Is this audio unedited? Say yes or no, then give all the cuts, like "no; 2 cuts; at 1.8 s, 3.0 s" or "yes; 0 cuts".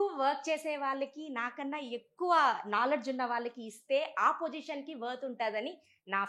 yes; 0 cuts